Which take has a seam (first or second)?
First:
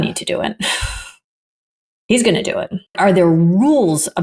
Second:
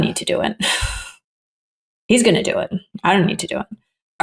first